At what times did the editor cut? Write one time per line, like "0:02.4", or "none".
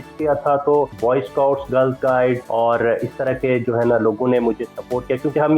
0:00.9
0:02.4